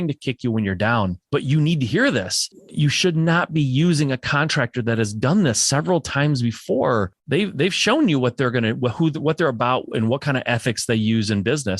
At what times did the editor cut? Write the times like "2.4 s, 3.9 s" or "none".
1.2 s, 2.6 s, 7.2 s